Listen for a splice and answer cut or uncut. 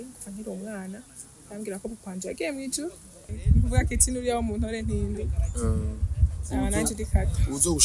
cut